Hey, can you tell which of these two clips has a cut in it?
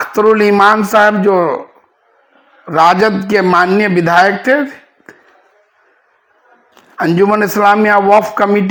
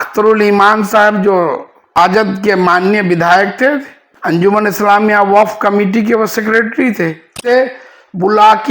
second; 3 cuts; at 2.0 s, 4.4 s, 7.5 s

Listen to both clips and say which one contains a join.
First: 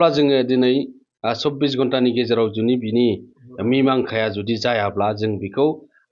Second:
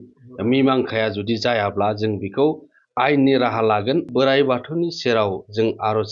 second; 1 cut; at 4.1 s

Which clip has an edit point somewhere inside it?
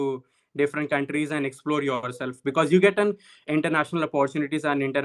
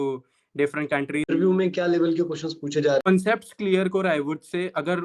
second; 2 cuts; at 1.3 s, 3.1 s

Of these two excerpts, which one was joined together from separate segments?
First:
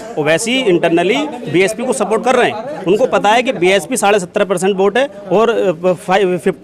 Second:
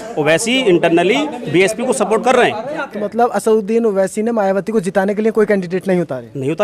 second; 1 cut; at 2.8 s

